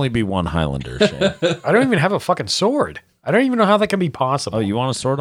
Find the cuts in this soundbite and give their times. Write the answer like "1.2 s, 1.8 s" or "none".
none